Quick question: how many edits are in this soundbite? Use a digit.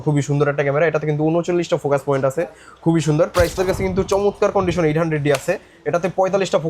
1